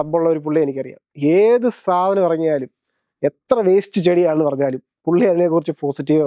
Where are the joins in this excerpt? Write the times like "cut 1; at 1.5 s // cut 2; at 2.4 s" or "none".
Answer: none